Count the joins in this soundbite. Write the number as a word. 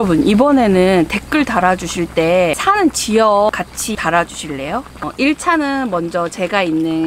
three